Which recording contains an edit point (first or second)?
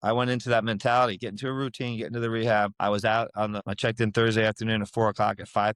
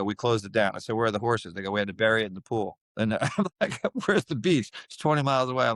first